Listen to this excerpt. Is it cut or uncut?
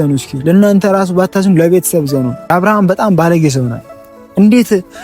cut